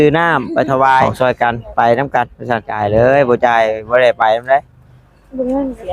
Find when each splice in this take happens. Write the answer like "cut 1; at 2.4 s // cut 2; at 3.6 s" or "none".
cut 1; at 1.1 s // cut 2; at 2.7 s